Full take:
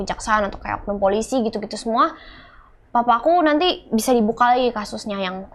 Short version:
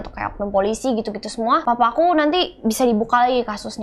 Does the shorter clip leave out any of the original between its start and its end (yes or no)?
yes